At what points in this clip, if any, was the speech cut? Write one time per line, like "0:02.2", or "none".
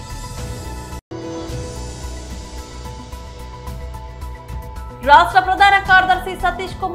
0:01.0
0:04.4